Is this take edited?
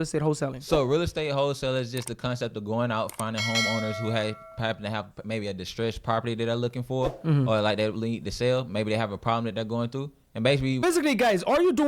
yes; 1 cut; at 10.8 s

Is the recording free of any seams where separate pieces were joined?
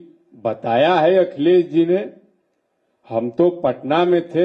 yes; 0 cuts

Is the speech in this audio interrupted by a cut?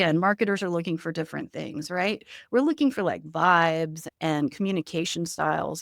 yes; 1 cut; at 4.0 s

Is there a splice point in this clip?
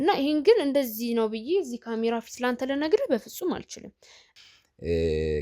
yes; 1 cut; at 4.3 s

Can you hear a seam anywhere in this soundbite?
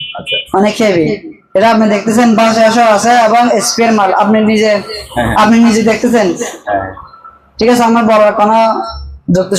no; 0 cuts

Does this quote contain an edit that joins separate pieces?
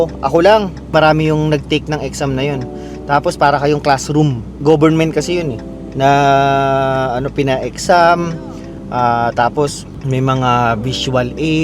yes; 1 cut; at 0.9 s

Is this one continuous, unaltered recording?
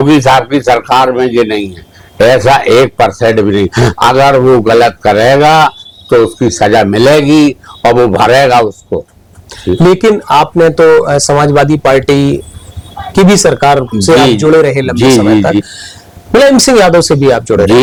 yes; 0 cuts

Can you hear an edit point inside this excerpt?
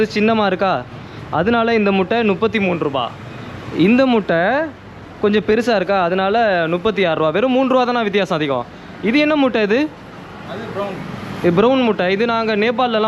no; 0 cuts

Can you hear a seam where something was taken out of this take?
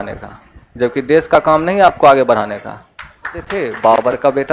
yes; 1 cut; at 3.5 s

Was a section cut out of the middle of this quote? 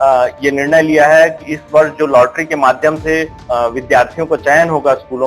yes; 1 cut; at 3.4 s

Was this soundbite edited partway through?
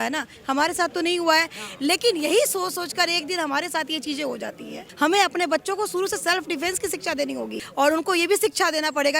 yes; 2 cuts; at 4.8 s, 7.6 s

